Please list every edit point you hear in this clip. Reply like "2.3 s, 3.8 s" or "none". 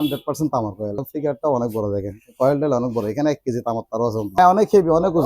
1.0 s, 4.4 s